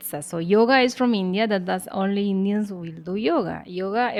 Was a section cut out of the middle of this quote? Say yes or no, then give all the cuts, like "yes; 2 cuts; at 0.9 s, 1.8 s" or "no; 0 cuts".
no; 0 cuts